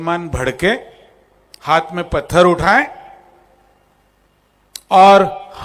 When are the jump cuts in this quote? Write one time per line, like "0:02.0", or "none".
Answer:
none